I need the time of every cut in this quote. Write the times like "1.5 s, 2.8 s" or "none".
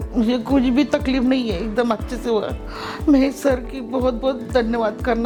none